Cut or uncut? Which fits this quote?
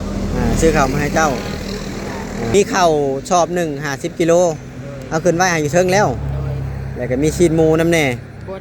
cut